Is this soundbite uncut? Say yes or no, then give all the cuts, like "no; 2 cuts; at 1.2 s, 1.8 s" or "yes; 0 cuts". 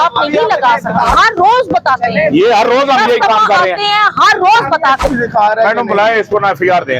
no; 2 cuts; at 1.1 s, 5.0 s